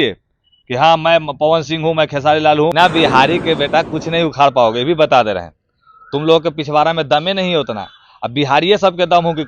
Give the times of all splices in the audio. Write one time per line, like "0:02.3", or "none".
0:02.7